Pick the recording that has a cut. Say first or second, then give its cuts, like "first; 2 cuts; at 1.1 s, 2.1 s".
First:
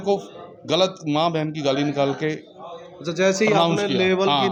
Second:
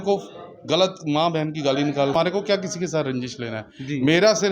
second; 1 cut; at 2.1 s